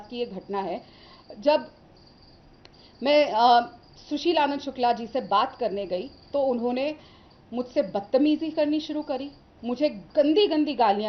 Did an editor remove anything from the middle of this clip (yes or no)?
no